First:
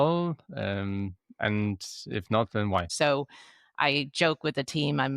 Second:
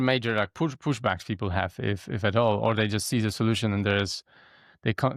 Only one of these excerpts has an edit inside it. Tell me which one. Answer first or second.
first